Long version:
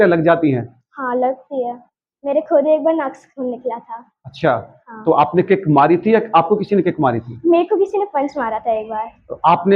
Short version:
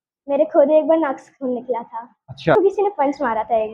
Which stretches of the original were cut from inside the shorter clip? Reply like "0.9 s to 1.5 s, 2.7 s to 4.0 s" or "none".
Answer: 4.5 s to 7.7 s